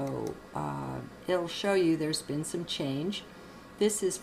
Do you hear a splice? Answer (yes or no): yes